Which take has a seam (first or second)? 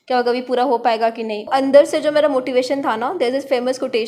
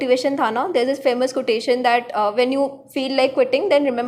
first